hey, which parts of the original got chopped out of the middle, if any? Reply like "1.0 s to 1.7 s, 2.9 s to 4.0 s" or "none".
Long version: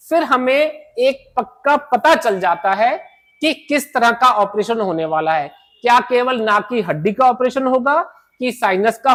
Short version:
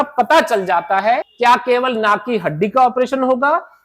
3.0 s to 5.7 s